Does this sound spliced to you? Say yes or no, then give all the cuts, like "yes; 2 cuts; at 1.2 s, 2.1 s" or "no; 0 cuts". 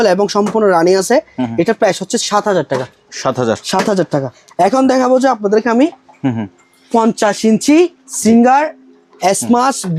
no; 0 cuts